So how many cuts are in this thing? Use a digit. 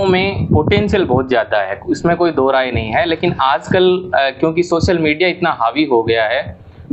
0